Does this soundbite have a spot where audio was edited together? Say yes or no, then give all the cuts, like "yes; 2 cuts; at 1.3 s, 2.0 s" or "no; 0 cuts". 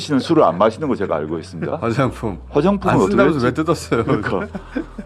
yes; 1 cut; at 1.7 s